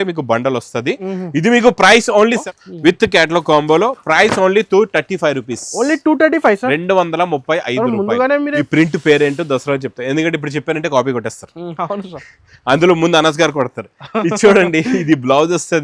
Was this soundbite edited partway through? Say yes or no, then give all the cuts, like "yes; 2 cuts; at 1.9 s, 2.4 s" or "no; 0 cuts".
yes; 2 cuts; at 2.4 s, 8.6 s